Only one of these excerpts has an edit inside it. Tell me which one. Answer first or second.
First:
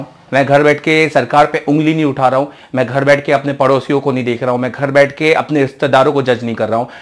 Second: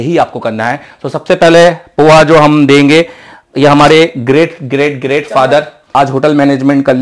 second